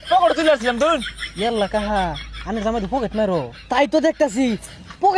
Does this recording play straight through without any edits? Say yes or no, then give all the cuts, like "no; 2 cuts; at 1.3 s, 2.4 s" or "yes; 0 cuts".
no; 1 cut; at 1.2 s